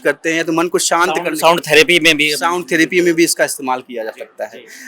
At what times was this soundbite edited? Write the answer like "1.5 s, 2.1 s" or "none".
none

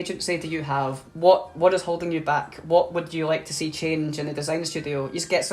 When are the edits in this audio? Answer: 1.0 s

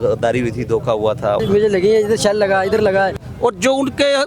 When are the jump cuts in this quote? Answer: 1.4 s, 3.3 s

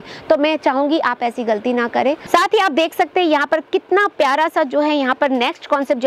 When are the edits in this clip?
2.2 s

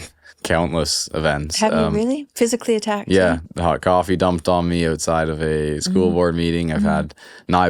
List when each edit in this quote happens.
3.4 s

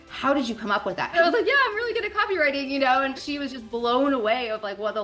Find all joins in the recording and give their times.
1.1 s, 3.2 s

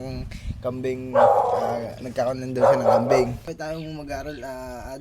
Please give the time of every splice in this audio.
3.5 s

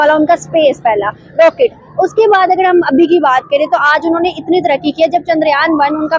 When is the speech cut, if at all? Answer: none

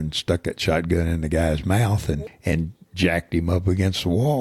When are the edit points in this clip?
2.2 s

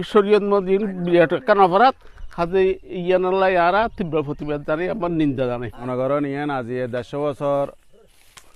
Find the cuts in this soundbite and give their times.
5.7 s

